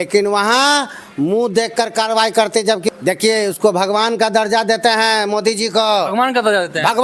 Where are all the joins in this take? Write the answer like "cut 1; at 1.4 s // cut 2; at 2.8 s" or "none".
cut 1; at 2.9 s